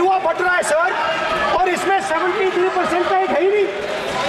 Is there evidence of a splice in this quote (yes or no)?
no